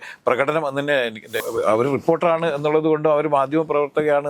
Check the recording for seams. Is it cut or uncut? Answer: cut